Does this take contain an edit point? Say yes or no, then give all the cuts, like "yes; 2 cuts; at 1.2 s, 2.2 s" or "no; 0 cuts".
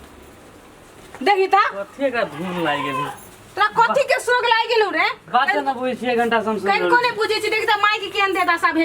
no; 0 cuts